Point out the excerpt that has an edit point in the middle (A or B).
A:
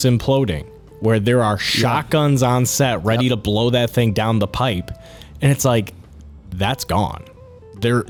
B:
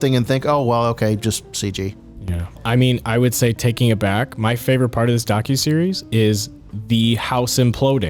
B